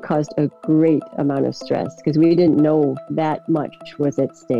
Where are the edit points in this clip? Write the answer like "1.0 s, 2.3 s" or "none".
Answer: 3.1 s